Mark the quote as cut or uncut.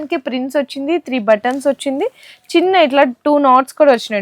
uncut